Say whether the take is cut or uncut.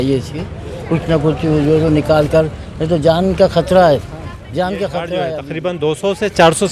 cut